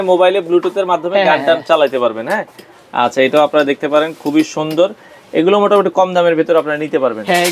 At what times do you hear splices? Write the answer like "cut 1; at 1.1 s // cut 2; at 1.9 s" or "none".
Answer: none